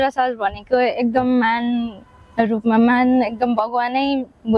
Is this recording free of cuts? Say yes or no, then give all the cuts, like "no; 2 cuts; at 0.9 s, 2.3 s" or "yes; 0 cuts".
yes; 0 cuts